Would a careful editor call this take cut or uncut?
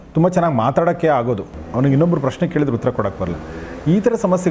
cut